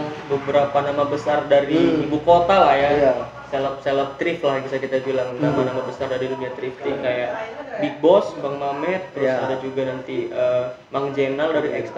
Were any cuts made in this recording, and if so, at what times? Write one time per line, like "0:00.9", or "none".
none

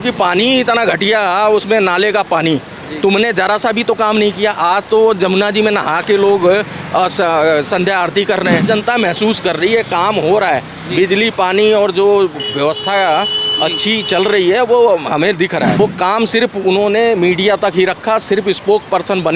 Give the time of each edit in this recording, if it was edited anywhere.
0:08.7
0:15.8

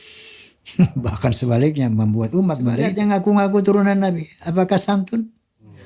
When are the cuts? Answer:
0:02.9

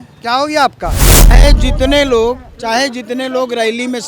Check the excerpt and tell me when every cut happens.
0:01.4

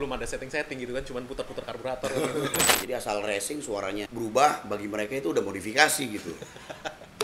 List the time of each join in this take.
0:02.7
0:04.1

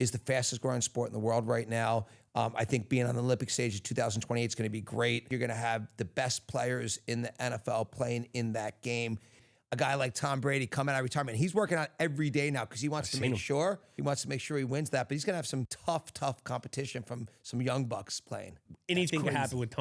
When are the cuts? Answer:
0:05.3
0:09.5
0:13.9
0:15.7
0:18.7

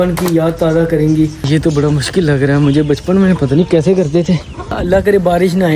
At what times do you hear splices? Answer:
0:01.4
0:04.7

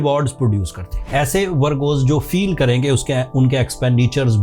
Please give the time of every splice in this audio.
0:00.9

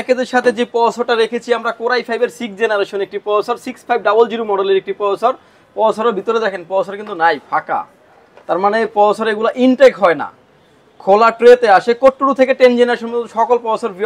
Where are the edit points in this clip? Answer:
none

